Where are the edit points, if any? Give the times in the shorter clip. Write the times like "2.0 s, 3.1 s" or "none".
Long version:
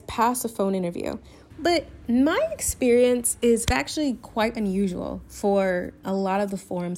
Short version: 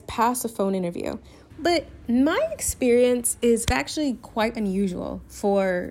none

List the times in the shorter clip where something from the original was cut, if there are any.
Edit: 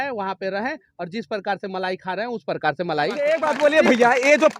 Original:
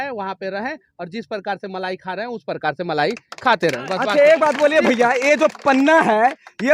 3.2 s

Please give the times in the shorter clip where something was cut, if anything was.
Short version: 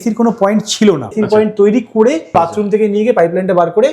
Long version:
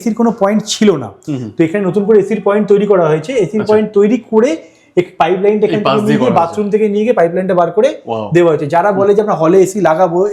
1.1 s, 2.3 s

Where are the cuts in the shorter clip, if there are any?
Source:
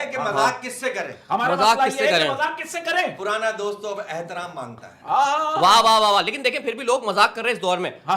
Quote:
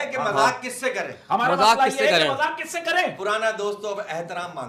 none

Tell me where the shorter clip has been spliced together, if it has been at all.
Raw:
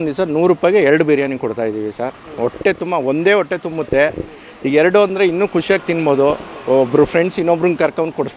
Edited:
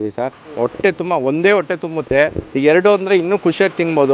2.4 s

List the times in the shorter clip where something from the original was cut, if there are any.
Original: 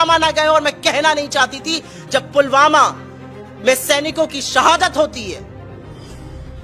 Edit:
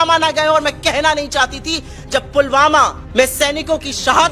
3.0 s

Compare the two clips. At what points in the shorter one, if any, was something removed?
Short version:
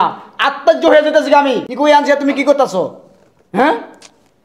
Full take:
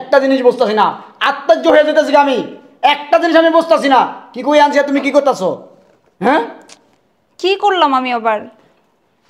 1.7 s

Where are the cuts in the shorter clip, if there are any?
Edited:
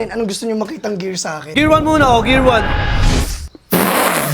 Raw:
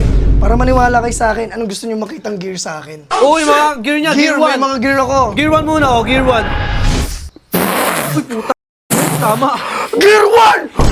1.5 s

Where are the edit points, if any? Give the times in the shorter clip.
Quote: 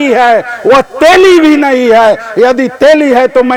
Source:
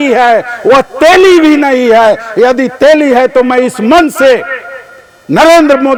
none

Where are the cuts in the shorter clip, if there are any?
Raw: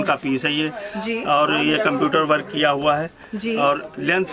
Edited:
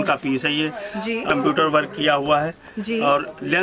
1.3 s

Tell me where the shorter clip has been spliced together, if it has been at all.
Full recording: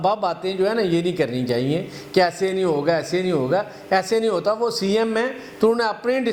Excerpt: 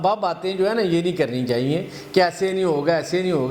none

